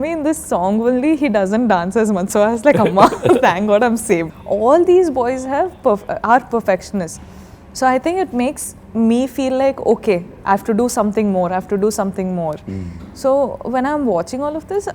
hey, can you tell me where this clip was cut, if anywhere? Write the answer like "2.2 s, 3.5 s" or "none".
4.3 s